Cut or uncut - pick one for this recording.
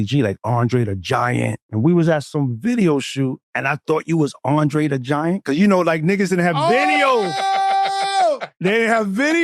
cut